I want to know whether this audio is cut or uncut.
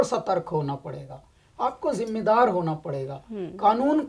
uncut